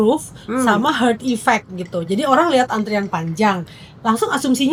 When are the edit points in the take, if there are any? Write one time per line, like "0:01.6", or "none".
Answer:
none